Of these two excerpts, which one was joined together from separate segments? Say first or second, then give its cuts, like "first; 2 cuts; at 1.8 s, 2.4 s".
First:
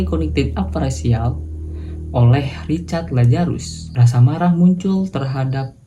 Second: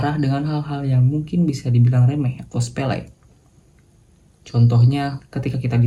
first; 1 cut; at 3.9 s